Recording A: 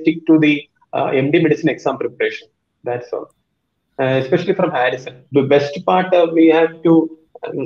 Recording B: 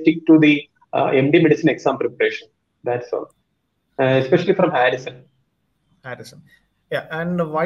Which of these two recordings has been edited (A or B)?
A